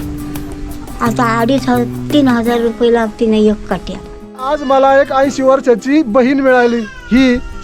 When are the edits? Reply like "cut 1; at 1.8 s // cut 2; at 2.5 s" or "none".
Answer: cut 1; at 4.5 s